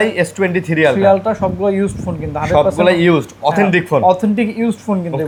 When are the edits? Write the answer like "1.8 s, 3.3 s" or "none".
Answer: none